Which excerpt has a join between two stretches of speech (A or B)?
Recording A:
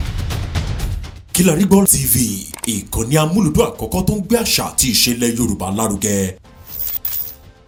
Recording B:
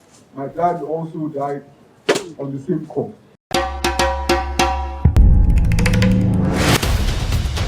B